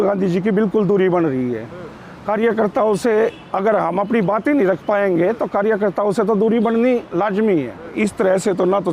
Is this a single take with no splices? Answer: no; 1 cut; at 7.8 s

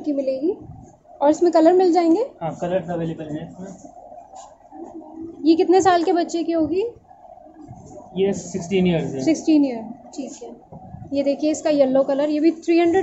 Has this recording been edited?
no; 0 cuts

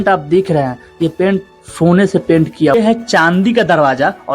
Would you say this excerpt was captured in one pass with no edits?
no; 1 cut; at 2.7 s

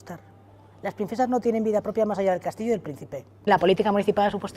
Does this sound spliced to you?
yes; 1 cut; at 3.5 s

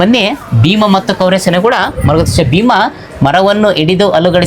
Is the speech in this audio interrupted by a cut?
no; 0 cuts

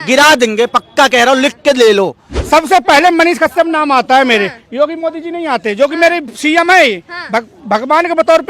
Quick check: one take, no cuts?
no; 1 cut; at 2.4 s

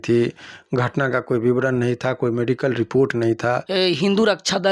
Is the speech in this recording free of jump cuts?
no; 1 cut; at 3.6 s

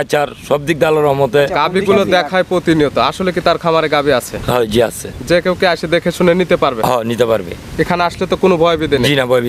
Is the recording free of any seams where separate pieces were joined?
yes; 0 cuts

